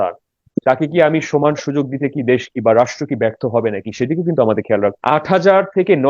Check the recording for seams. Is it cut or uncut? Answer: cut